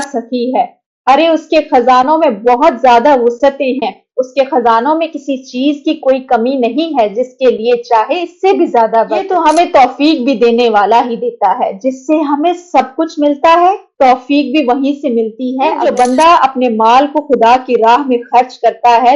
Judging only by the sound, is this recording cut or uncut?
cut